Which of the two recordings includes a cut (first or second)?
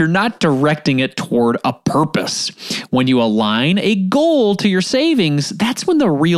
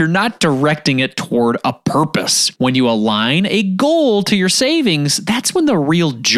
second